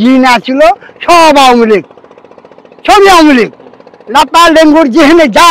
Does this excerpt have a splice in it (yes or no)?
no